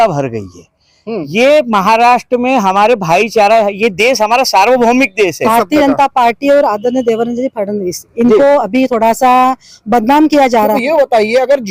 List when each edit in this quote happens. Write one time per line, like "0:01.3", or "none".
0:05.5
0:10.8